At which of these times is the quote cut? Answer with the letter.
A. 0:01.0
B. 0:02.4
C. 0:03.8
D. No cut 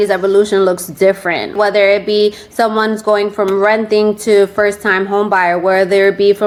D